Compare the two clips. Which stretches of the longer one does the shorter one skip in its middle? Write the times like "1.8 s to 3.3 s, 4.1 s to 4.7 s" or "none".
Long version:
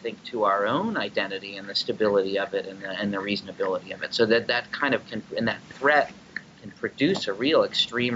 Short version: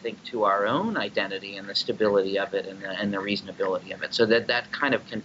none